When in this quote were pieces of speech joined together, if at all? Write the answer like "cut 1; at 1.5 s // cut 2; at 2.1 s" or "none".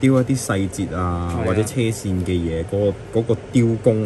none